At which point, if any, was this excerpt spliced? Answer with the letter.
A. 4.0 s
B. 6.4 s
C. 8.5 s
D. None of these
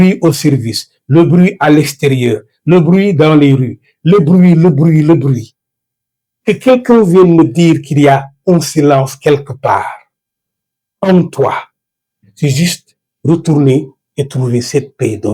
D